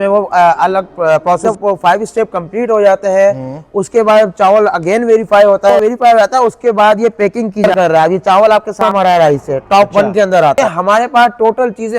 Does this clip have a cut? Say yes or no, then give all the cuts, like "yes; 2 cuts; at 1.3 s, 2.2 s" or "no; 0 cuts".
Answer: yes; 5 cuts; at 1.4 s, 5.8 s, 7.7 s, 8.9 s, 10.6 s